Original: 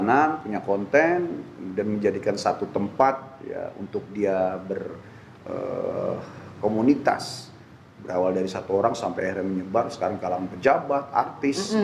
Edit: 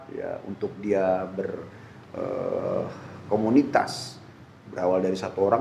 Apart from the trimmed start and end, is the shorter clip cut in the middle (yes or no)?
no